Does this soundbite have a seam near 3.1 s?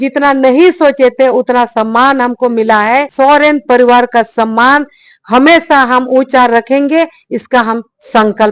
yes; 1 cut; at 3.1 s

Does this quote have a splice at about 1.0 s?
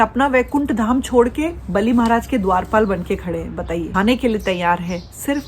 no; 1 cut; at 3.9 s

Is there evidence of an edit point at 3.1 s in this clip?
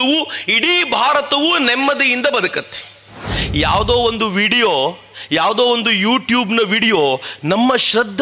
yes; 1 cut; at 3.1 s

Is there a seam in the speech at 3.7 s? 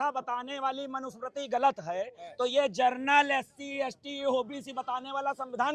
no; 0 cuts

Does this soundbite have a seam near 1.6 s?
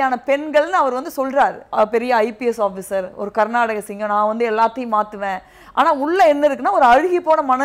yes; 1 cut; at 1.6 s

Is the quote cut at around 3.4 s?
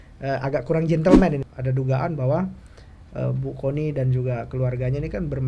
no; 1 cut; at 1.4 s

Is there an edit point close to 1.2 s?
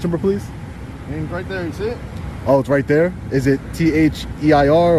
no; 0 cuts

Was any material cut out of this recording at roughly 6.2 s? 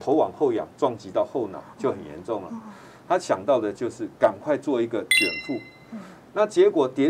yes; 1 cut; at 6.2 s

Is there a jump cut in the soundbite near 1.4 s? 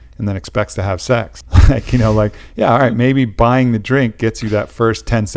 yes; 1 cut; at 1.4 s

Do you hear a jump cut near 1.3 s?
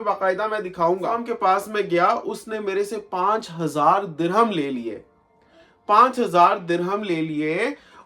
yes; 1 cut; at 1.3 s

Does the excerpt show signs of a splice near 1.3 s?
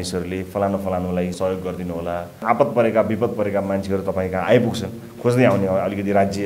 yes; 2 cuts; at 1.3 s, 2.4 s

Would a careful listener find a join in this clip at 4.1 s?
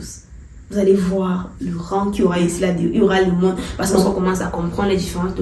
yes; 1 cut; at 4.1 s

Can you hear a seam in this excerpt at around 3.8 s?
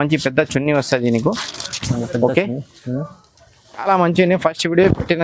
yes; 1 cut; at 3.8 s

